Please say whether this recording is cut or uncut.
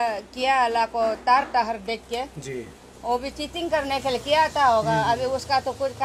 uncut